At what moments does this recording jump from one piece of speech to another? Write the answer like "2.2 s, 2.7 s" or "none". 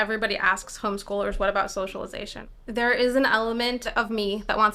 2.4 s, 3.8 s